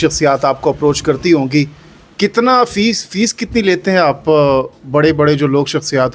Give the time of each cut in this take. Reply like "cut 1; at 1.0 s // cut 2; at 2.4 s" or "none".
none